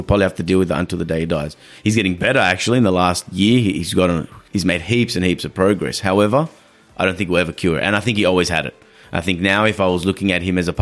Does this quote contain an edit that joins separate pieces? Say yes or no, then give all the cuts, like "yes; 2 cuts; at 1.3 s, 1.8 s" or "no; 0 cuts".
yes; 1 cut; at 4.4 s